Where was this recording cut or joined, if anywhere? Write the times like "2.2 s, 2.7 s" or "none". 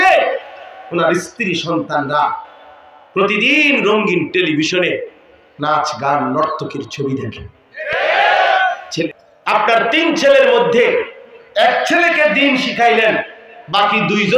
9.0 s